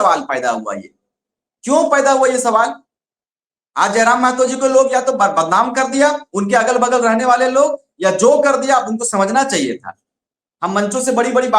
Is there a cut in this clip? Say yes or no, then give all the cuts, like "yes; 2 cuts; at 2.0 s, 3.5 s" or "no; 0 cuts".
no; 0 cuts